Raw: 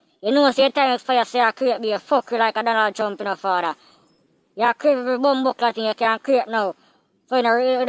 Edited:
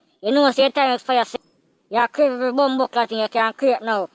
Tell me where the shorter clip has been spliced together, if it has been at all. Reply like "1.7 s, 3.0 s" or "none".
1.3 s